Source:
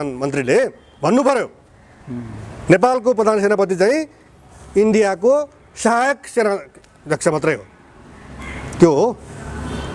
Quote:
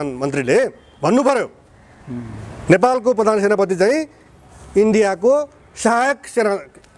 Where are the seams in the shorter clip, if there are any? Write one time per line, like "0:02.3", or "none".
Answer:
none